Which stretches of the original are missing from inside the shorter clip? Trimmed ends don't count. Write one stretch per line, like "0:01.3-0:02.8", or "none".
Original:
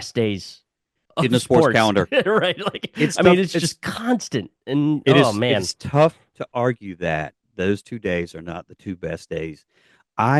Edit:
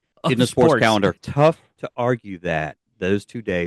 0:02.1-0:05.7